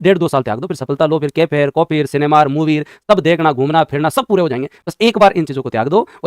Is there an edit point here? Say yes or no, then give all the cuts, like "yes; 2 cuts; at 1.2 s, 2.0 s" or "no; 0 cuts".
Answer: no; 0 cuts